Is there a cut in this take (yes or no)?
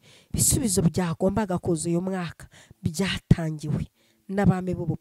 no